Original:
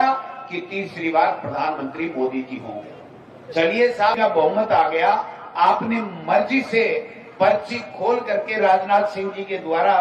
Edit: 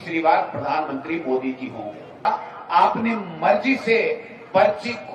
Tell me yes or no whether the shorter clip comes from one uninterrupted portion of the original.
no